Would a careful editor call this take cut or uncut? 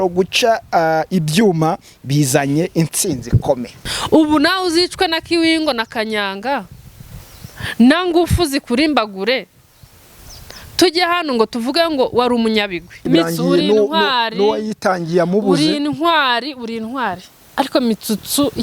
cut